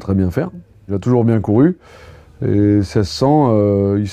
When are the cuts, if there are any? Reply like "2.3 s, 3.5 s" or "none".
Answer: 1.0 s